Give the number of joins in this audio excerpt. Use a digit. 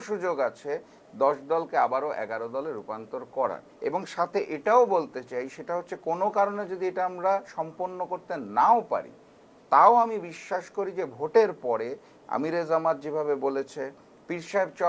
0